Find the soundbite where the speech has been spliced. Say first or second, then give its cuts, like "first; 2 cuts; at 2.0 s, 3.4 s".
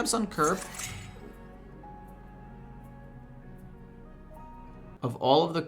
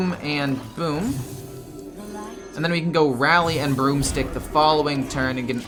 first; 1 cut; at 4.7 s